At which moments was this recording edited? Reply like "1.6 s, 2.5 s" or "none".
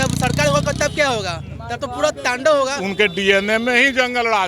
2.8 s